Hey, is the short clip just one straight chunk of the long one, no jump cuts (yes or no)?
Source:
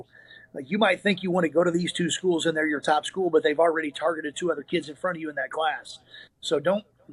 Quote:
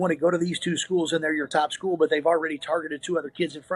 yes